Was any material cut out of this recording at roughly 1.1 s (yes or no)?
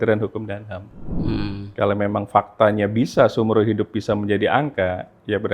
yes